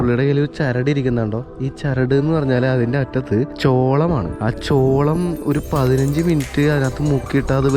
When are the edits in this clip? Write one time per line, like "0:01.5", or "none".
0:03.5
0:04.3